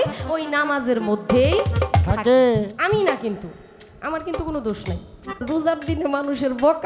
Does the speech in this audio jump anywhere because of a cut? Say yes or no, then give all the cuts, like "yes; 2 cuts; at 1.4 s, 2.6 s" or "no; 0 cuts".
yes; 1 cut; at 5.4 s